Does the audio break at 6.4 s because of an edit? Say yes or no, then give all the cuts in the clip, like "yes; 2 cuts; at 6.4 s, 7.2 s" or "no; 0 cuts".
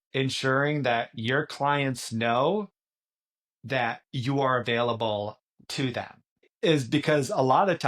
yes; 1 cut; at 6.4 s